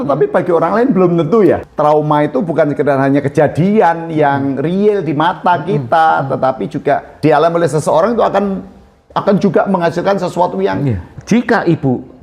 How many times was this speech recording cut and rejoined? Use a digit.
3